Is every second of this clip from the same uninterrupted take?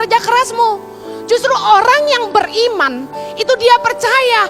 yes; 0 cuts

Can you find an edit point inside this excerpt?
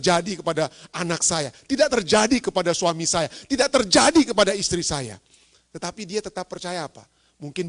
no; 0 cuts

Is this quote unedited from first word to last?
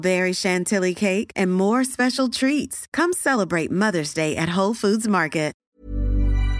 no; 1 cut; at 5.6 s

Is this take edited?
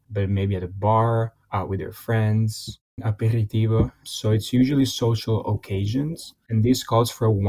yes; 3 cuts; at 1.4 s, 3.0 s, 4.0 s

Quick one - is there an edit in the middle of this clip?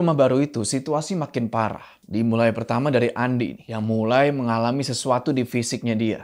yes; 1 cut; at 3.7 s

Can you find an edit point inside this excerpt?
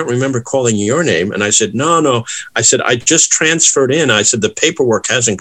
no; 0 cuts

